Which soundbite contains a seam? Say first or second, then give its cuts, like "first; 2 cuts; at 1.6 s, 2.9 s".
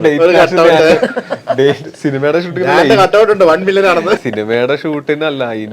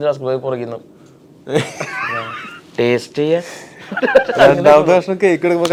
first; 1 cut; at 4.2 s